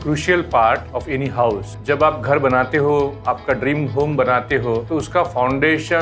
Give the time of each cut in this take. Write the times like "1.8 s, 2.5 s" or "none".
1.4 s, 4.8 s